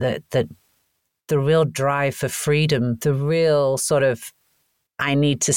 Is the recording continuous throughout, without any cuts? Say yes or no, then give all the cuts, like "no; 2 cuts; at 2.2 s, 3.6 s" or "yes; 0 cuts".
no; 1 cut; at 3.0 s